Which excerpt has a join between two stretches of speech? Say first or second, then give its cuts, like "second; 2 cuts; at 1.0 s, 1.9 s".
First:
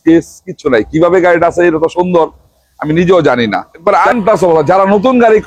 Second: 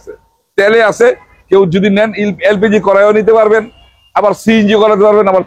first; 1 cut; at 3.7 s